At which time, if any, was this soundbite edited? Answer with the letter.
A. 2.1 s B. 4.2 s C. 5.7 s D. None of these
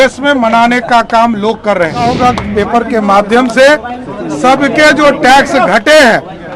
A